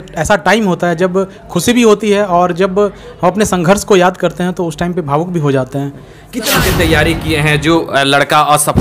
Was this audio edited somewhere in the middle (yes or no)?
yes